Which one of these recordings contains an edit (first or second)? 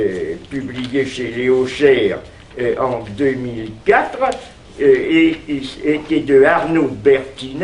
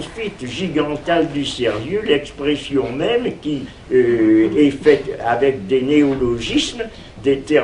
first